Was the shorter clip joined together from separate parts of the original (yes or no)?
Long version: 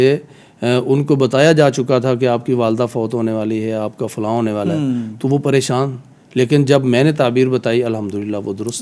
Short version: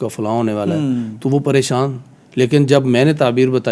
no